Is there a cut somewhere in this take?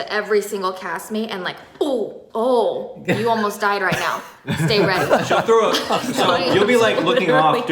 yes; 1 cut; at 2.2 s

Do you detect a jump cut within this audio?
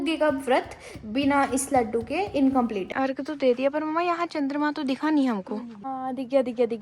yes; 2 cuts; at 2.9 s, 5.9 s

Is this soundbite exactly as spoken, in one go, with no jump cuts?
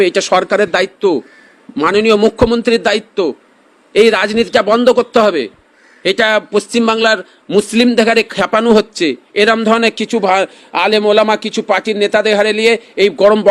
yes; 0 cuts

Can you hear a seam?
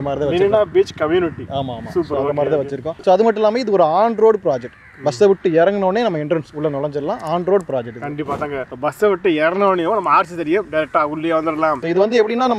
yes; 2 cuts; at 3.0 s, 11.8 s

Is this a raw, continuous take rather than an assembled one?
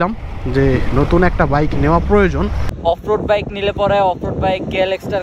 no; 1 cut; at 2.6 s

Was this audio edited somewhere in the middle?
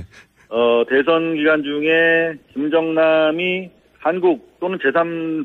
yes; 1 cut; at 1.0 s

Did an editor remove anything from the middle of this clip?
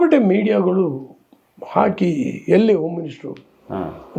no; 0 cuts

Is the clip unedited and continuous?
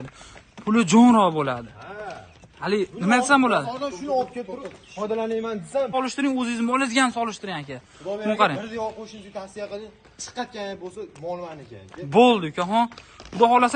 no; 1 cut; at 5.9 s

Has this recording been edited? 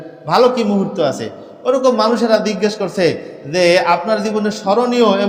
no; 0 cuts

